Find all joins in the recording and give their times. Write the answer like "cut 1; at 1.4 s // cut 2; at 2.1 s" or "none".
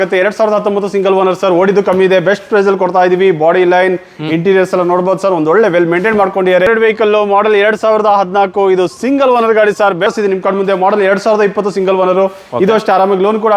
cut 1; at 6.7 s // cut 2; at 10.1 s